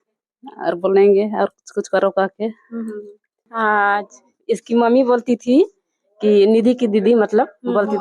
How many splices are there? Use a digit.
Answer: 1